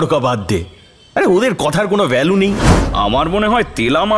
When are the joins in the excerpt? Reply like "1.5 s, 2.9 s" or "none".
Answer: 2.7 s